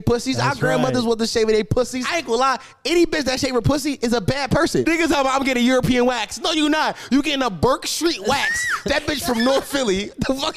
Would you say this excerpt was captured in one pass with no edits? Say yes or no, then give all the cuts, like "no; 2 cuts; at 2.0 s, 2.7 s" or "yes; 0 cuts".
no; 2 cuts; at 2.0 s, 4.8 s